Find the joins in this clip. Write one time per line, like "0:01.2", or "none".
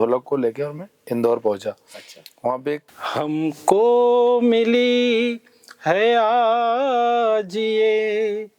0:02.9